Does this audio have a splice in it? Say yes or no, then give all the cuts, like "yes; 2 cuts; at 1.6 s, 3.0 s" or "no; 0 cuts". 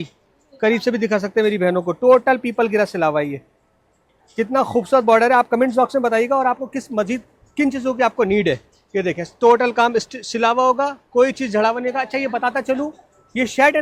no; 0 cuts